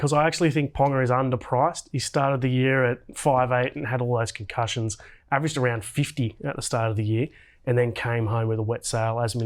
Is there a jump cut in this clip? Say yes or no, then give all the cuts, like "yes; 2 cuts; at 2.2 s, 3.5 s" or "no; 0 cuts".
no; 0 cuts